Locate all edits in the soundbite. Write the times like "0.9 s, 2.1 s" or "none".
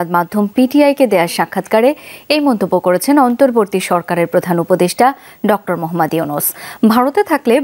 none